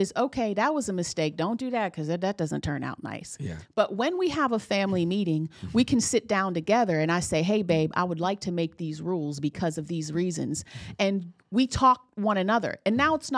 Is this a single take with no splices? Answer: yes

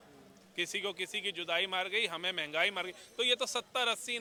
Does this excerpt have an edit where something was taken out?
no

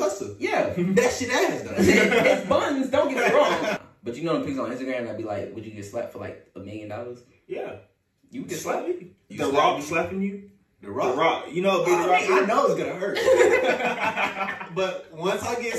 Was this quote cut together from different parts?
yes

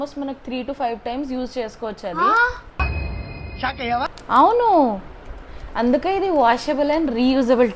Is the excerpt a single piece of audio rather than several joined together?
yes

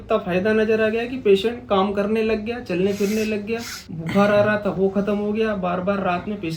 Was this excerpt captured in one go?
yes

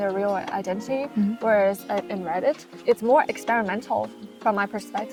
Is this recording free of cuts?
yes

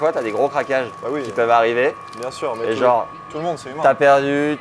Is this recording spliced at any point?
no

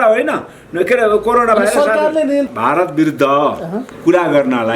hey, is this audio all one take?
no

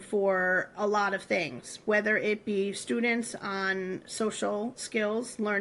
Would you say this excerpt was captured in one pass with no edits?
yes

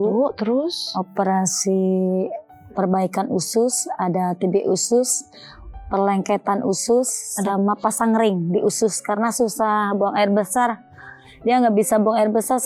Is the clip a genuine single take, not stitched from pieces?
yes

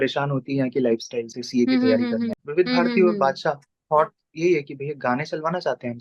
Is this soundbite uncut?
no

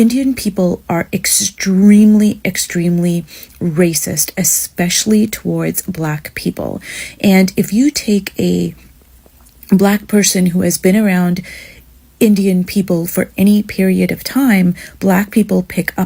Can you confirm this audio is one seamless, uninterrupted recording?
yes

